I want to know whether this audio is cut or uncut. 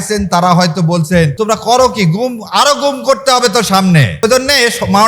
cut